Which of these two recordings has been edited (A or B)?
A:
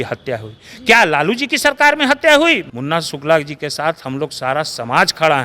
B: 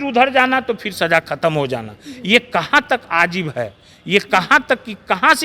A